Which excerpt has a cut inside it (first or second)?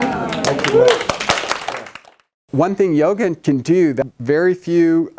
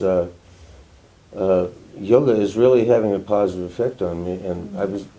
first